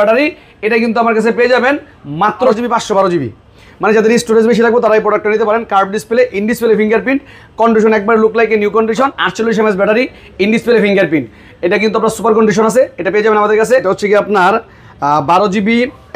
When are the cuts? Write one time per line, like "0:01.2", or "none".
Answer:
0:02.5
0:09.2
0:13.8